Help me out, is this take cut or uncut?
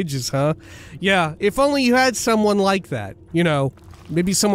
cut